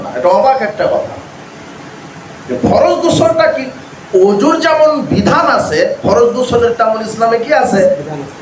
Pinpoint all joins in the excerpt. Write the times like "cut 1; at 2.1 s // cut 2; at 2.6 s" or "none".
none